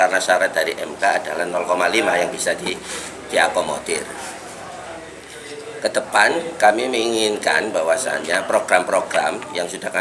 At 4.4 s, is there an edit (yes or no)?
no